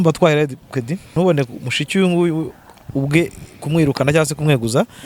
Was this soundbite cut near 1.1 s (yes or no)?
yes